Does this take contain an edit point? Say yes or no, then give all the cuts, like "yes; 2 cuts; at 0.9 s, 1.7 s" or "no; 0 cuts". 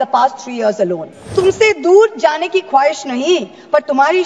yes; 1 cut; at 1.3 s